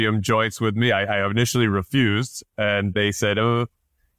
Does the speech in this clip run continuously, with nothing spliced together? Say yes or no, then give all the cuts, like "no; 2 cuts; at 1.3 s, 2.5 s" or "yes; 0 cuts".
no; 1 cut; at 2.9 s